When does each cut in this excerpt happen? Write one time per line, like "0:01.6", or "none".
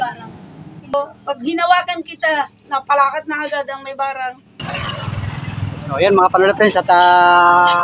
0:00.9
0:04.6